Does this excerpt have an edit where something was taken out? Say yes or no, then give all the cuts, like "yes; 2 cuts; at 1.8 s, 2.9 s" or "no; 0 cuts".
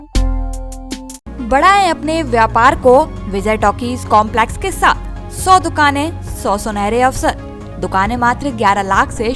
no; 0 cuts